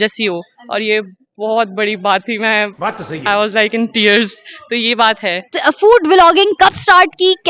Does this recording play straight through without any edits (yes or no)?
yes